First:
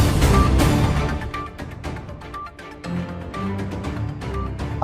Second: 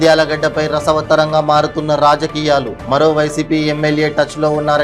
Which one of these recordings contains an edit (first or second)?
first